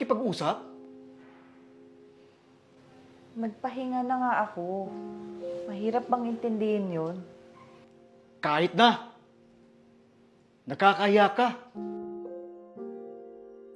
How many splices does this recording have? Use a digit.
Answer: 1